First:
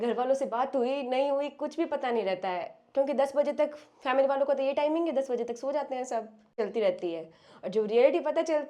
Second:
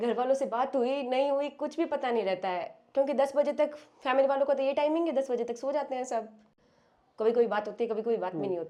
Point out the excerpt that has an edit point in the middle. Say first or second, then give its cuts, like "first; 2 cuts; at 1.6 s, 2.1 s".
first; 1 cut; at 6.5 s